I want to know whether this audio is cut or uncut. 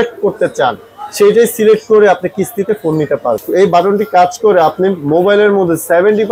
cut